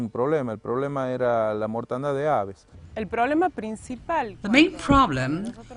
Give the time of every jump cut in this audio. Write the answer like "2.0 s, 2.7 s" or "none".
none